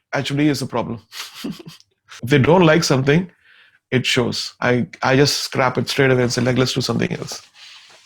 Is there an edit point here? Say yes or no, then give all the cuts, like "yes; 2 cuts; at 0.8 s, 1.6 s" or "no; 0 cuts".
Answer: yes; 2 cuts; at 2.2 s, 4.5 s